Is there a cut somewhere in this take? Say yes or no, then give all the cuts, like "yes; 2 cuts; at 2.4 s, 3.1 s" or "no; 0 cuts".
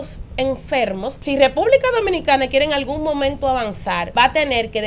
yes; 2 cuts; at 1.1 s, 4.1 s